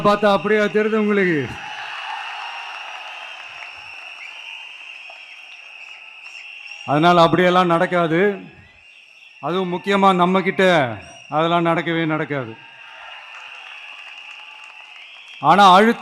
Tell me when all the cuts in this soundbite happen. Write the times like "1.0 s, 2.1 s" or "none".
none